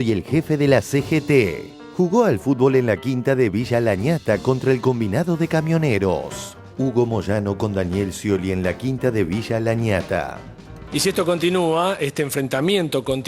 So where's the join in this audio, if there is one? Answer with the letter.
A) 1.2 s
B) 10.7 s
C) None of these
B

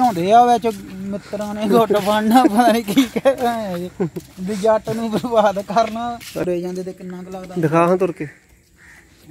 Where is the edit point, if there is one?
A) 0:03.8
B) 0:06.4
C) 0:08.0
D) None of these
B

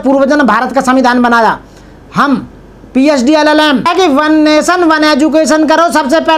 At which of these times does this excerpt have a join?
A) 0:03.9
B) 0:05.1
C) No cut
A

